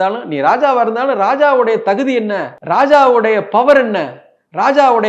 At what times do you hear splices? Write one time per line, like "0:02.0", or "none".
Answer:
0:02.5